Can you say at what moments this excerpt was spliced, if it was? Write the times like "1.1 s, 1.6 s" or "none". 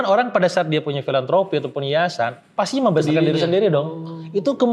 none